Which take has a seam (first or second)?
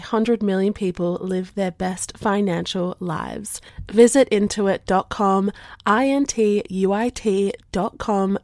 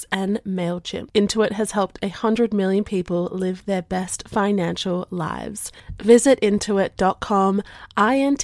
second